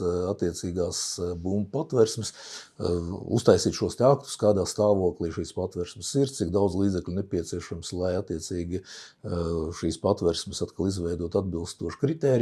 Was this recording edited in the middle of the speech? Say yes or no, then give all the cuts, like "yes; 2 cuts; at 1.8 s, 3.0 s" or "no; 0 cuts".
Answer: no; 0 cuts